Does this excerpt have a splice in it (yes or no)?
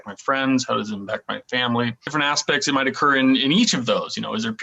no